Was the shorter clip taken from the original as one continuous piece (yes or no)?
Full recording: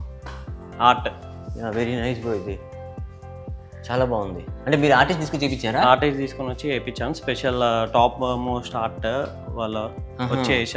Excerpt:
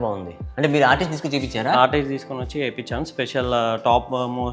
yes